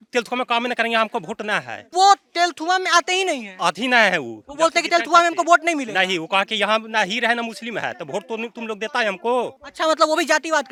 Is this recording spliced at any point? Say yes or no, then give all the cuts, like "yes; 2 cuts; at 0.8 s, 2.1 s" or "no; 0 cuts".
no; 0 cuts